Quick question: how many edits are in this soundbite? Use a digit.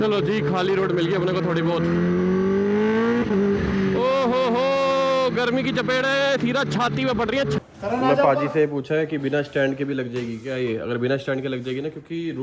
1